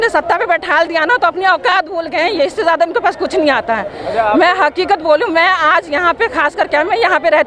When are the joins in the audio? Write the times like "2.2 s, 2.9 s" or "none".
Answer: none